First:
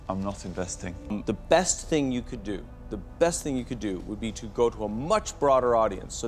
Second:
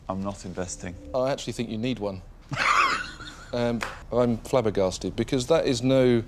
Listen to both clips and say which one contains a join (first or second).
second